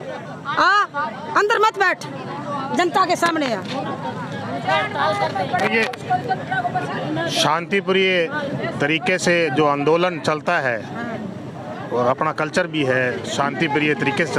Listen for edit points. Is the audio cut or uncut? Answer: uncut